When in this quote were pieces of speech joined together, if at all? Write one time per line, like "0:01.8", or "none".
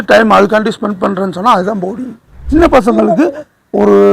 0:02.4

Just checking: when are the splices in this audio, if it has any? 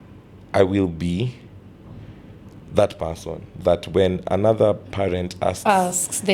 none

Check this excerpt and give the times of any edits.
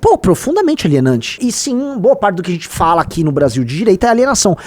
0:01.4

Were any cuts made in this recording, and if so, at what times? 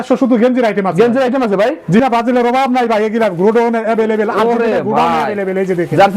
0:02.0

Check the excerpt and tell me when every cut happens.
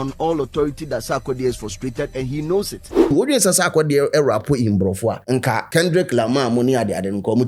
0:03.1
0:05.6

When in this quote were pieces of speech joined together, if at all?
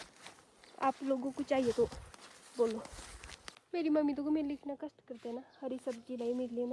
0:03.5

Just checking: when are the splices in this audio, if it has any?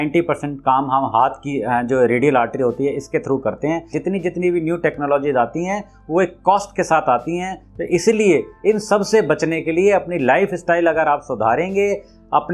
0:03.9

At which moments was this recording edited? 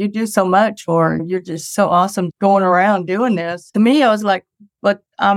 0:01.2
0:02.3
0:03.7

